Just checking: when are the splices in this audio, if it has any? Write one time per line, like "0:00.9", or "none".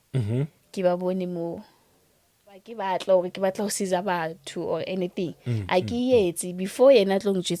0:02.7